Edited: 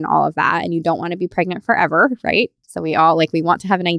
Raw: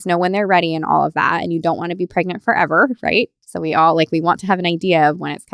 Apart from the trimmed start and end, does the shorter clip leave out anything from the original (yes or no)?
no